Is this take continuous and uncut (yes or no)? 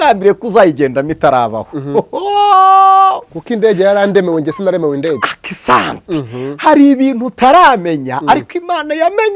yes